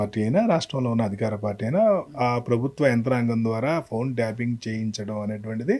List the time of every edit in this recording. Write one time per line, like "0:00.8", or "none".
none